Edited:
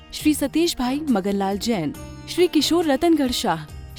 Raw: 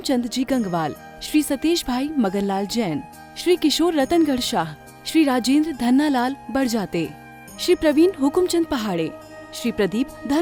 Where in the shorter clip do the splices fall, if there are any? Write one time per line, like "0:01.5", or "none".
none